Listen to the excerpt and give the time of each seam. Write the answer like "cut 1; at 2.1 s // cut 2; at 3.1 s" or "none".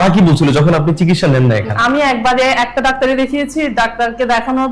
none